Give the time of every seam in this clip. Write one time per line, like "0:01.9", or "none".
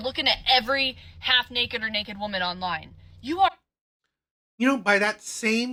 none